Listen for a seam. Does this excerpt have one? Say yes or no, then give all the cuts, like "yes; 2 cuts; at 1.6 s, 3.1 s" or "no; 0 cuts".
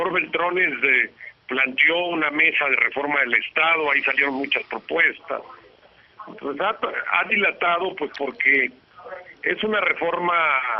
yes; 1 cut; at 4.6 s